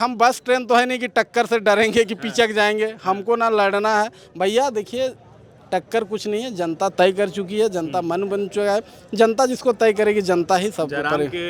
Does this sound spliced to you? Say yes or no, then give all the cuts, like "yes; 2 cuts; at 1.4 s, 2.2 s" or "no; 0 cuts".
no; 0 cuts